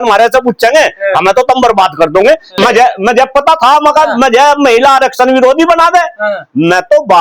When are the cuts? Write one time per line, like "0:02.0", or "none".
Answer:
0:02.6